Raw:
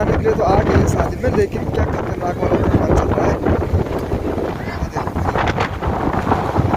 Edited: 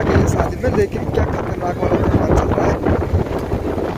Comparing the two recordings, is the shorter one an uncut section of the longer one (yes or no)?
yes